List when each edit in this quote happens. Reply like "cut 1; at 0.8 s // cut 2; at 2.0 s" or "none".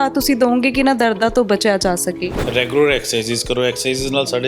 cut 1; at 2.3 s

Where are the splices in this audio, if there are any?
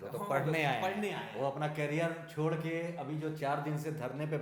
none

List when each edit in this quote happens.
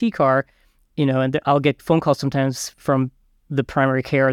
none

